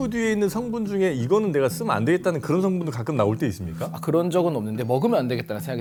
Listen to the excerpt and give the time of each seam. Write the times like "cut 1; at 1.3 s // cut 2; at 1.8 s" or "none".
none